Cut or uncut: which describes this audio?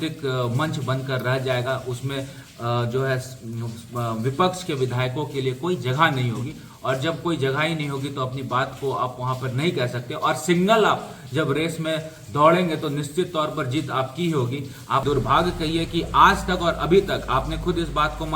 cut